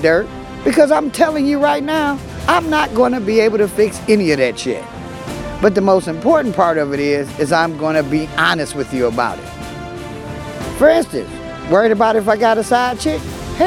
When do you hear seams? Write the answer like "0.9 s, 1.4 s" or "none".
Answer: 1.5 s